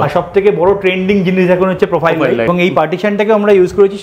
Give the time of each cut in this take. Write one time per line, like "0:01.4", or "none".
0:02.5